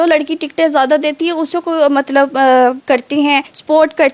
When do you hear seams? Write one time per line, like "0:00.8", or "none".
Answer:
0:03.2